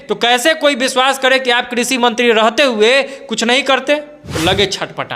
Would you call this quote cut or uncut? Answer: cut